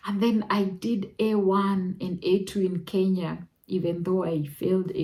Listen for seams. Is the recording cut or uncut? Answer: uncut